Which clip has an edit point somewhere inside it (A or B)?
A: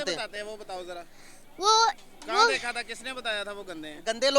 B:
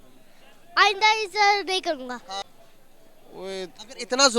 B